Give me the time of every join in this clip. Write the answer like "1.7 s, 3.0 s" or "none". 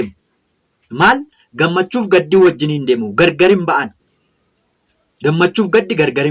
none